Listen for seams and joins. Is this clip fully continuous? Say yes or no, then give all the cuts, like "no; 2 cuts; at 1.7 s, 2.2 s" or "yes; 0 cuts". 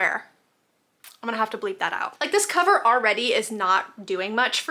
no; 1 cut; at 2.0 s